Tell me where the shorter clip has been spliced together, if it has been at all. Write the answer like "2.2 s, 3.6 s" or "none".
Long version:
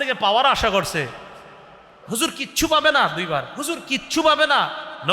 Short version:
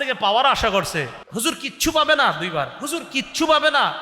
1.2 s